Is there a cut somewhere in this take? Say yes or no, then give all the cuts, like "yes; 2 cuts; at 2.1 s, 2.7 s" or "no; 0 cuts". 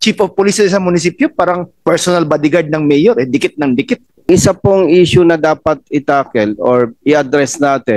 yes; 1 cut; at 4.3 s